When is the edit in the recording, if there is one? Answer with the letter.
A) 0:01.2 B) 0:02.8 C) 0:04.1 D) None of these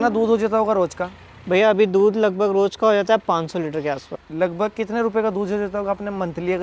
C